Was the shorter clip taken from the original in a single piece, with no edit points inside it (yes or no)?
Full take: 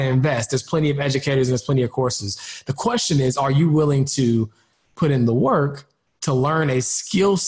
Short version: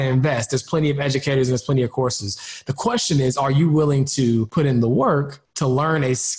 no